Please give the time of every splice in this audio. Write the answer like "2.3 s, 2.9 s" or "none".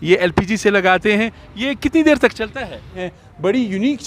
3.0 s